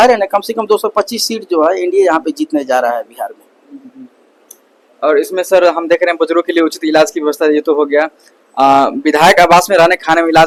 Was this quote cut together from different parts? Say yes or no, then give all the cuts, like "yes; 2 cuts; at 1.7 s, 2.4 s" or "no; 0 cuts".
no; 0 cuts